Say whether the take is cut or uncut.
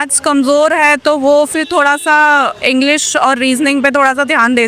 uncut